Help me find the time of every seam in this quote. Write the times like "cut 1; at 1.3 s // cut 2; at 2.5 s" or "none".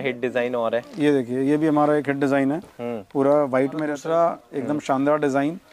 cut 1; at 3.9 s